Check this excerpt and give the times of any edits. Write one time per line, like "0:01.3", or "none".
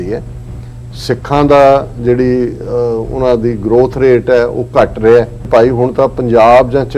0:05.4